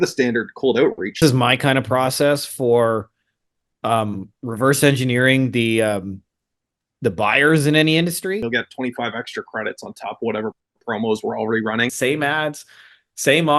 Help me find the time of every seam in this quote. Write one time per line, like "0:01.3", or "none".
0:01.2
0:08.4
0:11.9